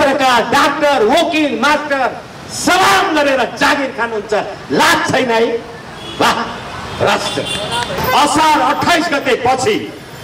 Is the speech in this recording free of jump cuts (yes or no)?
no